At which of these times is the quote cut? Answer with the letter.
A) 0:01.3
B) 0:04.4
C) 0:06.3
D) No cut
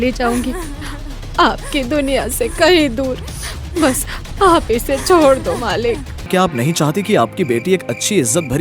C